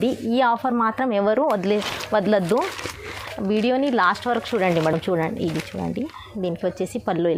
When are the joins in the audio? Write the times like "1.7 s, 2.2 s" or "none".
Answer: none